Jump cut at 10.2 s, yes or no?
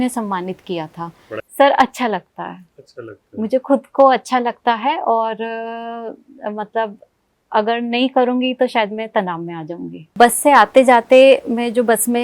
yes